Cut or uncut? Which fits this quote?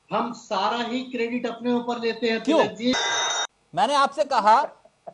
cut